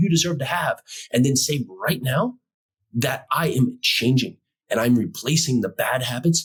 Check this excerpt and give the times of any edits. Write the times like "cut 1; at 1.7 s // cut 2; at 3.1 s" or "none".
none